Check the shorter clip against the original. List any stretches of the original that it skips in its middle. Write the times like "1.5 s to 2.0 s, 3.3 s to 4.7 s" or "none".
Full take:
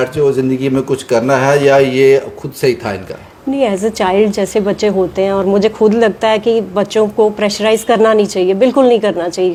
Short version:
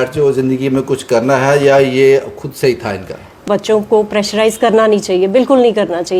3.4 s to 6.7 s